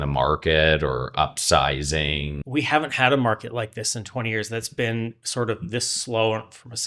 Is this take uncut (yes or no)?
no